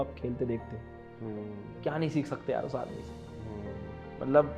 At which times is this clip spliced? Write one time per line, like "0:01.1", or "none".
none

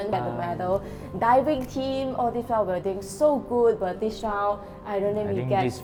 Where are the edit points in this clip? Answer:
none

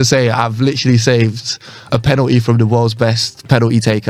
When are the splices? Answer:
none

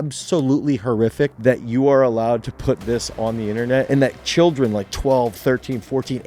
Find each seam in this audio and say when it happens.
0:01.4
0:03.9

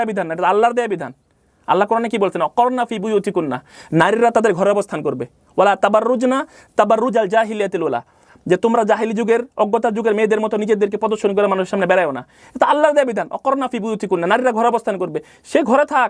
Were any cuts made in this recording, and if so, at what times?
none

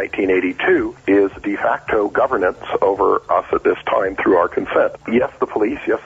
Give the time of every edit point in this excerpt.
0:00.9
0:03.3
0:05.0

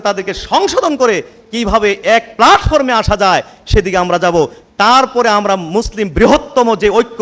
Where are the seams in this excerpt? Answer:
none

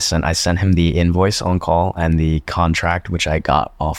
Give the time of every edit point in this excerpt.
none

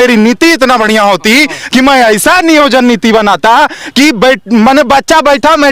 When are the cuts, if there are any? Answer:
none

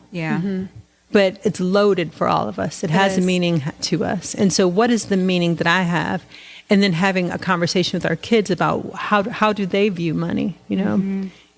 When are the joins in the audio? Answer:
0:01.4

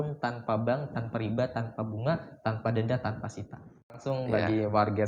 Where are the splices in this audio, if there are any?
0:04.0

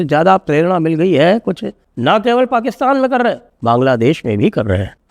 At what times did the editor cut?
0:01.8

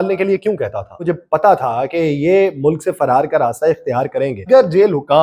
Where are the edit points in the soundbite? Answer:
0:01.1
0:04.5

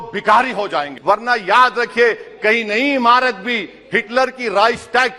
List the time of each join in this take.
0:00.9

